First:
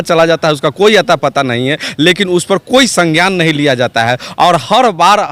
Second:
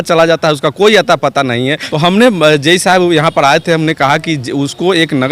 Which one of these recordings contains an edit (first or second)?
second